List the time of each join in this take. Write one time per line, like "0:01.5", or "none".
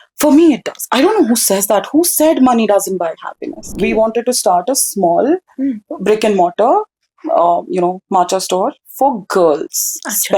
0:03.7